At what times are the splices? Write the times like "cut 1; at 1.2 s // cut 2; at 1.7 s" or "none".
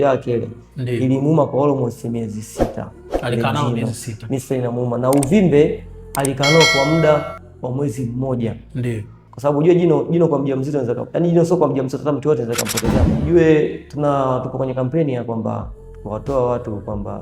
cut 1; at 9.1 s // cut 2; at 13.1 s